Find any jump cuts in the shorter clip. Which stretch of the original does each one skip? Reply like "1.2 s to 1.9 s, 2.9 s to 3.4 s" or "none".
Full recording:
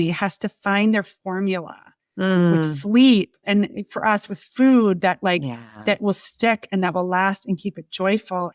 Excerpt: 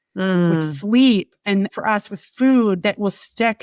3.5 s to 3.7 s, 5.0 s to 5.8 s